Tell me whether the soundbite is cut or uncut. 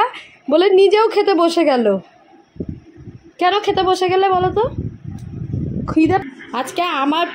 cut